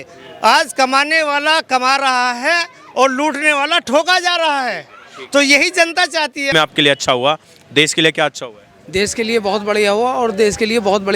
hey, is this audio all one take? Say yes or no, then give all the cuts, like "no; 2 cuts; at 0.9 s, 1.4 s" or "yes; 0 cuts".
no; 1 cut; at 6.5 s